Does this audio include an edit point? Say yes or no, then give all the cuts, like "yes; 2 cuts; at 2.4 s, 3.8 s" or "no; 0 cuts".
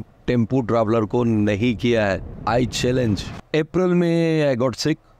yes; 2 cuts; at 2.3 s, 3.3 s